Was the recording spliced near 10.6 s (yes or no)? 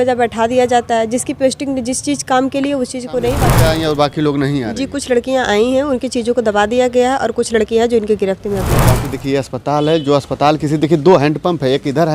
no